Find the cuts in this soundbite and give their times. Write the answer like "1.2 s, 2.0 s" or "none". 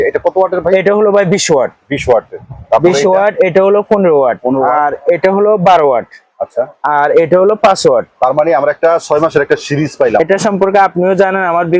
10.2 s